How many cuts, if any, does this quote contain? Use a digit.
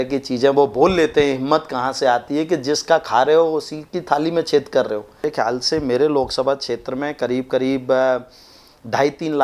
1